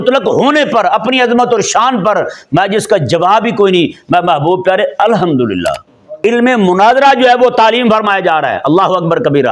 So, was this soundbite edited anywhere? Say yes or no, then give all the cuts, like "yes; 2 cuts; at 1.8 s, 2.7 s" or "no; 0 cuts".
yes; 1 cut; at 6.2 s